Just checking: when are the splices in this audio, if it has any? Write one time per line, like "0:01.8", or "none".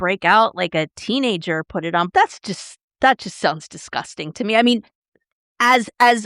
0:02.1